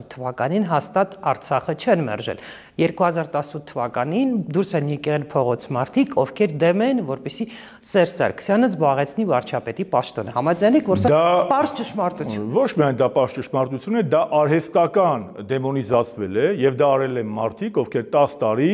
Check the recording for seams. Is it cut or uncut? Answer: uncut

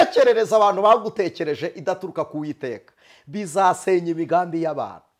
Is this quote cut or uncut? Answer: uncut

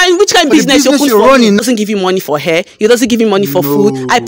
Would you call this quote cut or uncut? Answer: cut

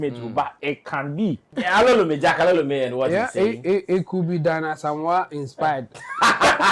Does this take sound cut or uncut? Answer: cut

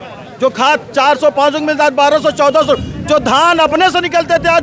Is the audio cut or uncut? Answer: uncut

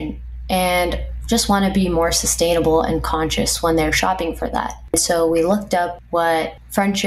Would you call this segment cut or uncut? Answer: cut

